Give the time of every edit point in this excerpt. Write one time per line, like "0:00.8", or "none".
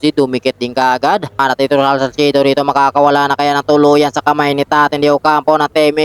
0:01.4